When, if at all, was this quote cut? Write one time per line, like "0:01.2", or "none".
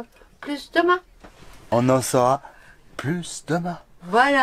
0:01.6